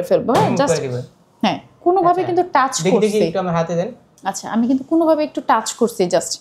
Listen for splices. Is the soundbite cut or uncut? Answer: uncut